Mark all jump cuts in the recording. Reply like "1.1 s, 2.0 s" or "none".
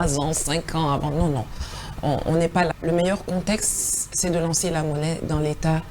2.7 s

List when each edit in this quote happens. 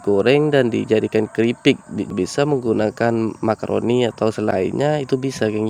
2.1 s, 4.5 s

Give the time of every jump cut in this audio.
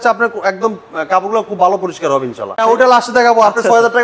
2.6 s

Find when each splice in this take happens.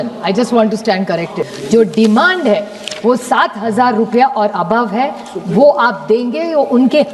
1.5 s

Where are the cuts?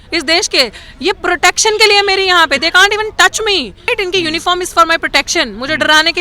3.9 s

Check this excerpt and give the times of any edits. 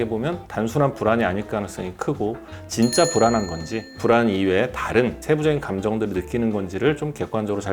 2.5 s, 4.0 s, 5.2 s

